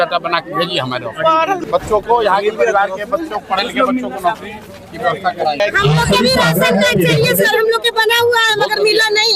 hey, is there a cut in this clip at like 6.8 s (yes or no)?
no